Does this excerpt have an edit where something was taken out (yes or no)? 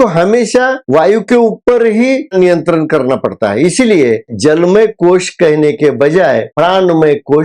yes